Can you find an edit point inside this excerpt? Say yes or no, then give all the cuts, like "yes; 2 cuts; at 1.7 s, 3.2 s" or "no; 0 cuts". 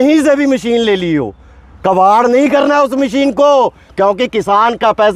no; 0 cuts